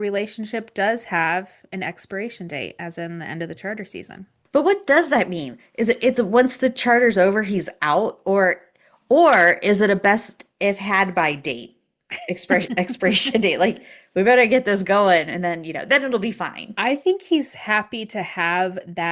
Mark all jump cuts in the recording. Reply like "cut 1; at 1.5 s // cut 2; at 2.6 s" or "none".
cut 1; at 4.3 s